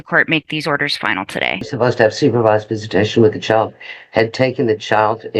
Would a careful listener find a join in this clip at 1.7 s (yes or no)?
yes